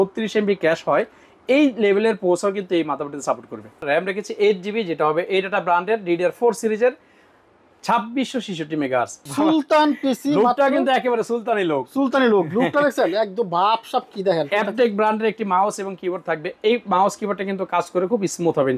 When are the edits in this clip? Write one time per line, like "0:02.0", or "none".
0:03.8
0:09.2
0:14.5